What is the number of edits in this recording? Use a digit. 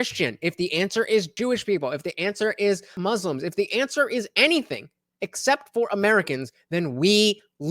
2